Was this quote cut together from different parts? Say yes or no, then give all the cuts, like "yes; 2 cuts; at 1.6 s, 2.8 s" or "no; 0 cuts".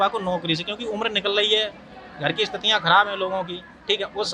no; 0 cuts